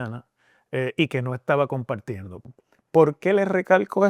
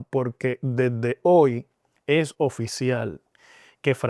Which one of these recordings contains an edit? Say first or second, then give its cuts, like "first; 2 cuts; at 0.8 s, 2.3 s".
first; 1 cut; at 2.3 s